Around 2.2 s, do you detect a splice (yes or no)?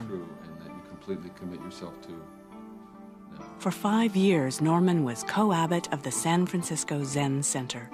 no